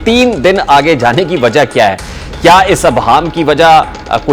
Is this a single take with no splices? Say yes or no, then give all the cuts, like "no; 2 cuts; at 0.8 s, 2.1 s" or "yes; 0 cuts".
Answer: yes; 0 cuts